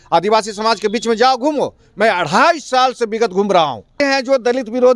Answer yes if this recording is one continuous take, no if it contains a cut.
no